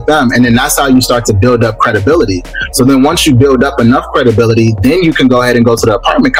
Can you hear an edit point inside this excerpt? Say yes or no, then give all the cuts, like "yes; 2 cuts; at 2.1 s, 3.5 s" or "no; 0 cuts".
no; 0 cuts